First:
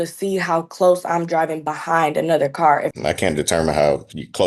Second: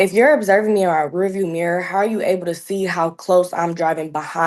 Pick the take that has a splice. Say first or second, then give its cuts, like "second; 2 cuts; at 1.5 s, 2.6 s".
first; 1 cut; at 2.9 s